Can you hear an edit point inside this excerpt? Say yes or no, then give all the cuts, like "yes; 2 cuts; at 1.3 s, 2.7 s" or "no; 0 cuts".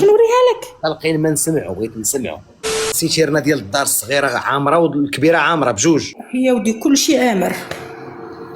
yes; 2 cuts; at 2.9 s, 6.2 s